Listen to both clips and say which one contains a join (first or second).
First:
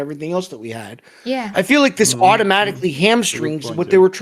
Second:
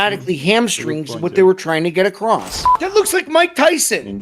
second